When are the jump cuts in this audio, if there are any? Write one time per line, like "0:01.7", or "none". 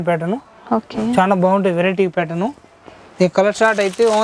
none